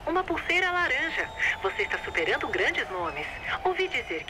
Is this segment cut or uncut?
uncut